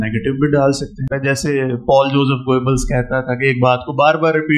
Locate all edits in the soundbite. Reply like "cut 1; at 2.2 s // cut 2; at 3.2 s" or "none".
cut 1; at 1.1 s